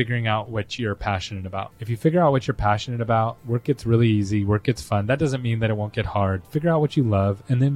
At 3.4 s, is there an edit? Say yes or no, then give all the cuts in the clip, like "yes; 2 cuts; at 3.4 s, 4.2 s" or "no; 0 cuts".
yes; 3 cuts; at 1.8 s, 3.4 s, 6.4 s